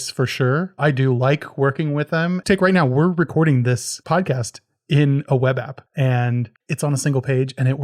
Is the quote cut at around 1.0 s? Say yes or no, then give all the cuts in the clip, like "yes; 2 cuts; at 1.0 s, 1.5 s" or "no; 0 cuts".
no; 4 cuts; at 2.4 s, 3.9 s, 5.8 s, 6.6 s